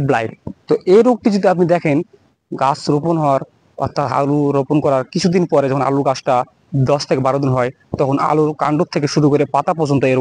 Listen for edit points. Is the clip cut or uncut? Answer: uncut